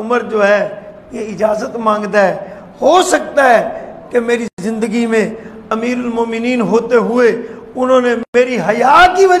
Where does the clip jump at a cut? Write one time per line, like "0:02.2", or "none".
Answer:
none